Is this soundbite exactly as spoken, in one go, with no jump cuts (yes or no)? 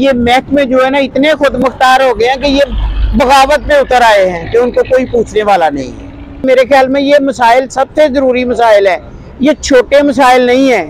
no